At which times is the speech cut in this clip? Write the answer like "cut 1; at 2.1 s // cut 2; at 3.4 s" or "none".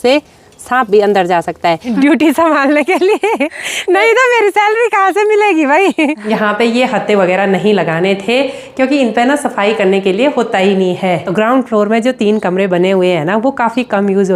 cut 1; at 1.9 s // cut 2; at 6.2 s // cut 3; at 11.2 s